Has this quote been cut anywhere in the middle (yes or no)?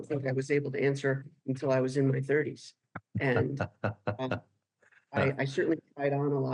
no